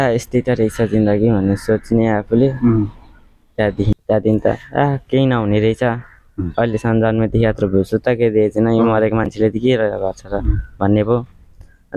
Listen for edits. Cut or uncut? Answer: cut